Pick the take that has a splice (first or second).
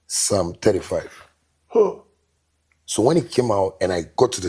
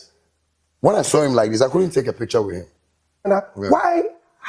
second